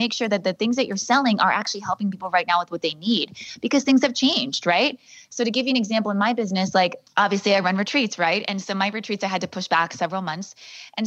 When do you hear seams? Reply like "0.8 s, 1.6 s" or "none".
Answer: none